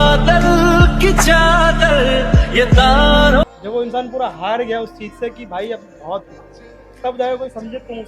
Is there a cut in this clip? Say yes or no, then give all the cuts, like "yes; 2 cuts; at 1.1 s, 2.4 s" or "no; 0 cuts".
yes; 1 cut; at 3.4 s